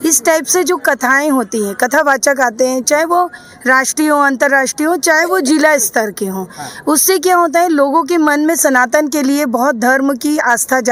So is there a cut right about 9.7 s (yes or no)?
no